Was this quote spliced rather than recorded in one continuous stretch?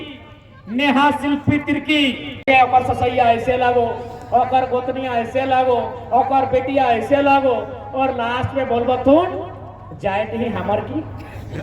yes; 1 cut; at 2.3 s

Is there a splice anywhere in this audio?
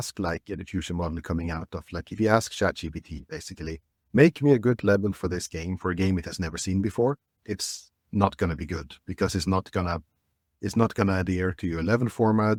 no; 0 cuts

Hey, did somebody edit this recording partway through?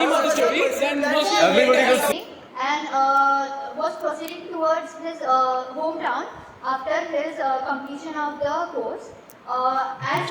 yes; 1 cut; at 2.1 s

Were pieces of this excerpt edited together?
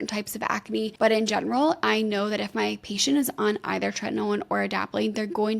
yes; 1 cut; at 0.9 s

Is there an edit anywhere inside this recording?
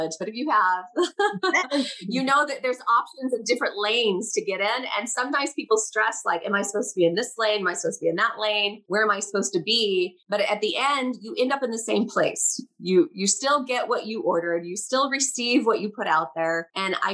no; 0 cuts

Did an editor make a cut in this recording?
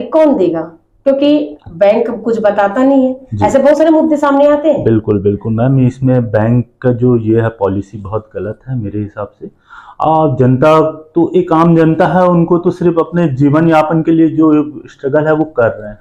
no; 0 cuts

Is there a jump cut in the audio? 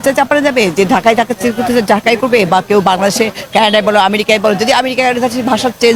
no; 0 cuts

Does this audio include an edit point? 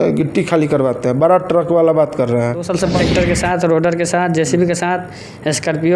yes; 1 cut; at 3.0 s

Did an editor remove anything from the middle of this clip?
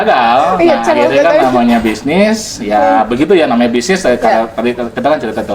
no; 0 cuts

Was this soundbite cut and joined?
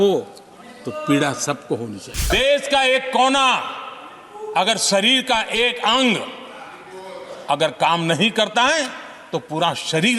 yes; 1 cut; at 2.3 s

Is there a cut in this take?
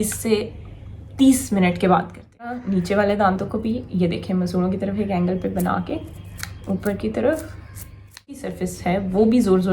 yes; 2 cuts; at 2.6 s, 8.5 s

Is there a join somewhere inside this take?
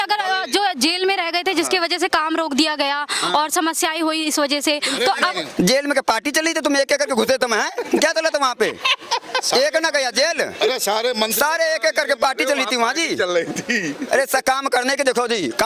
no; 0 cuts

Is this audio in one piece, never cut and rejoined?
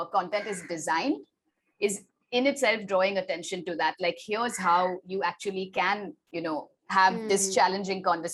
yes; 0 cuts

